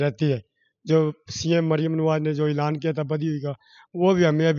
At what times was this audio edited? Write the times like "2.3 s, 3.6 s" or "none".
none